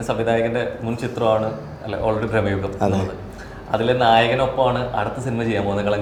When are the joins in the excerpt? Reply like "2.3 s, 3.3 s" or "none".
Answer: none